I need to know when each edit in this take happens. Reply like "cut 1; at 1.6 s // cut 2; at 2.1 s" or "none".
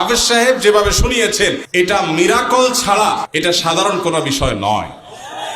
cut 1; at 1.6 s // cut 2; at 3.3 s